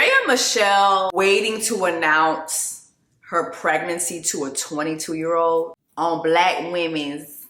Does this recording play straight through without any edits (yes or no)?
no